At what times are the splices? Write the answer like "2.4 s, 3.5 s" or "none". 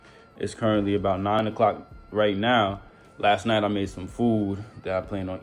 1.4 s